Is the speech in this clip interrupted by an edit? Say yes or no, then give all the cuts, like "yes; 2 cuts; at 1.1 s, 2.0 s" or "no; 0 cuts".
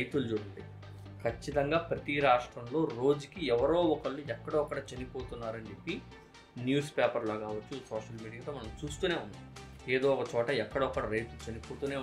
no; 0 cuts